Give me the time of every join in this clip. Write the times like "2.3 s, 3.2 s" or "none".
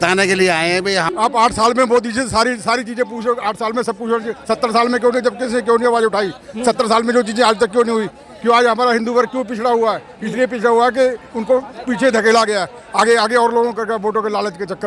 1.1 s